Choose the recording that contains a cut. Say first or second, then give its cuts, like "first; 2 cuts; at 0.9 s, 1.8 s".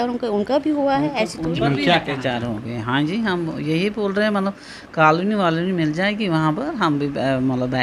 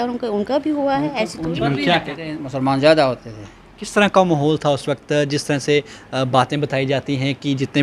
second; 1 cut; at 2.1 s